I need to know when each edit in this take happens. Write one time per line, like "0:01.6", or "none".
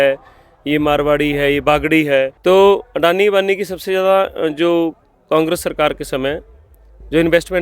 0:02.3